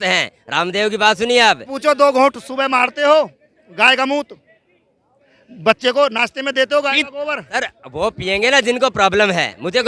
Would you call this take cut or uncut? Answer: uncut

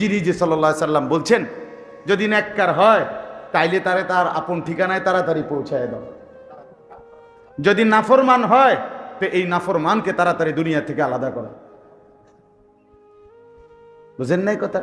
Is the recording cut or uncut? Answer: uncut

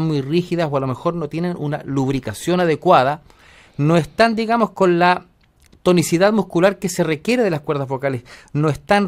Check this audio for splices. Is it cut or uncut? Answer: uncut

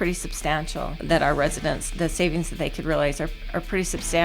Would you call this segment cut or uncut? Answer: cut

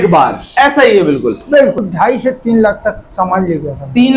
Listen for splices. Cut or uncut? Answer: cut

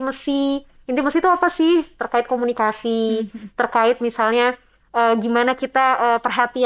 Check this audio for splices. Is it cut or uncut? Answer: uncut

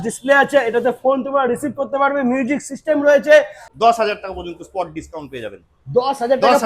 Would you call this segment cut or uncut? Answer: cut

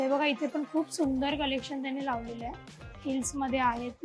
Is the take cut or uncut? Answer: uncut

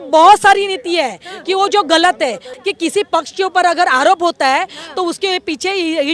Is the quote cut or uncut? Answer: cut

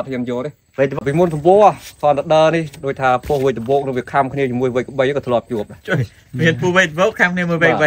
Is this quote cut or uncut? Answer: cut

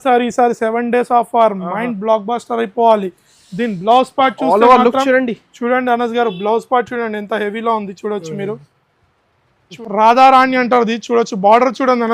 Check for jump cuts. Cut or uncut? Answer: cut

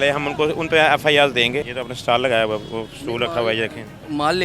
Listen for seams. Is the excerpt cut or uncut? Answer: cut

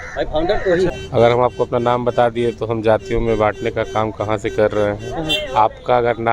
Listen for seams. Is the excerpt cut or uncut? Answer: cut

